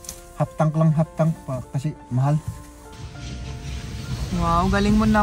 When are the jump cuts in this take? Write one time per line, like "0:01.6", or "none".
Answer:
0:03.0